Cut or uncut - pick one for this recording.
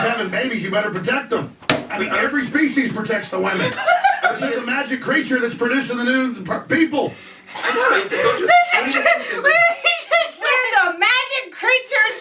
uncut